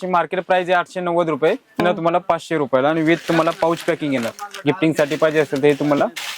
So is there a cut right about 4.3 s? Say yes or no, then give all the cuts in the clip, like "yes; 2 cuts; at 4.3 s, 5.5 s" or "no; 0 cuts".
no; 1 cut; at 1.8 s